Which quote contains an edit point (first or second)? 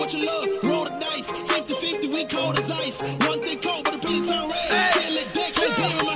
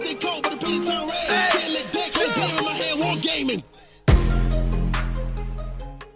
first